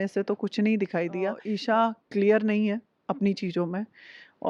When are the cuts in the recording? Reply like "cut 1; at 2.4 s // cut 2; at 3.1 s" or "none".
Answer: cut 1; at 1.5 s